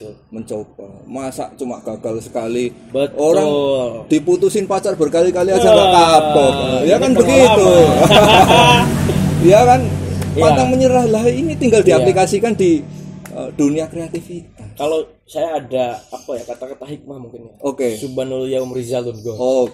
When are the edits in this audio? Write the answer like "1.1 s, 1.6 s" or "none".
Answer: none

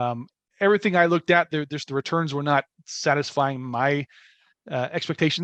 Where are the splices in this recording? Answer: none

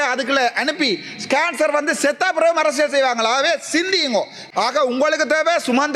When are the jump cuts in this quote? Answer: 4.4 s

